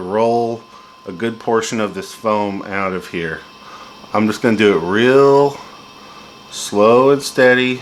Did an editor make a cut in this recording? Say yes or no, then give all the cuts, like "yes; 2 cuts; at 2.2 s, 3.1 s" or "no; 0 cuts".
no; 0 cuts